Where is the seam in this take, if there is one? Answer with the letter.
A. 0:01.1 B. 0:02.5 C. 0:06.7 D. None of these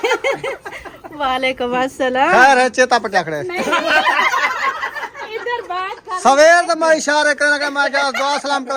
D